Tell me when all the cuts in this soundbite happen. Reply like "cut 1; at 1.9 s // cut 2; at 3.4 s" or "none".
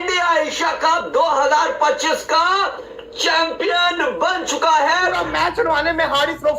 cut 1; at 5.2 s